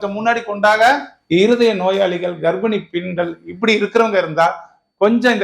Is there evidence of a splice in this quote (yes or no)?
yes